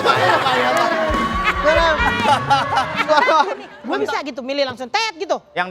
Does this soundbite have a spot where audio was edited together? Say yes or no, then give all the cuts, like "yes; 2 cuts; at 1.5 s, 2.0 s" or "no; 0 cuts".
yes; 1 cut; at 3.7 s